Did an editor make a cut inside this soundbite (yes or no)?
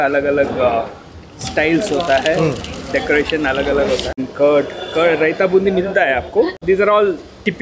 yes